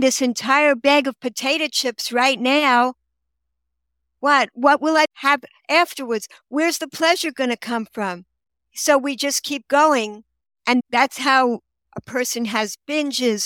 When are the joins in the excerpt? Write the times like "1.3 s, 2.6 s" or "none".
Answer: 5.1 s, 10.8 s